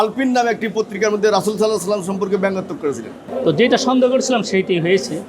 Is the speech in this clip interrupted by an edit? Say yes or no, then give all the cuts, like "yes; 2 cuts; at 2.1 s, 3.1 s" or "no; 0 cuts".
yes; 1 cut; at 3.1 s